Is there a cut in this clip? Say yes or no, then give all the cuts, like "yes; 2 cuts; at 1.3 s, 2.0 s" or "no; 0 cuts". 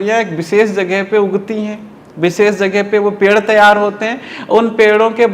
no; 0 cuts